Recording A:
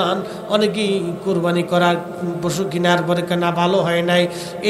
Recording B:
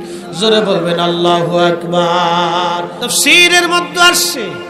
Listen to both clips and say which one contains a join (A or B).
B